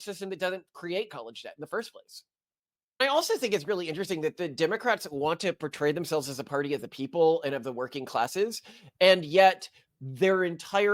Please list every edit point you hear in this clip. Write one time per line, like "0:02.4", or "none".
0:03.0